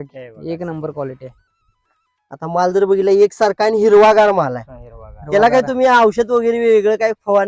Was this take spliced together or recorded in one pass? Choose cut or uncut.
uncut